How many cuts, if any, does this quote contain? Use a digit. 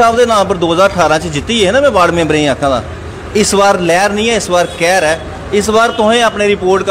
0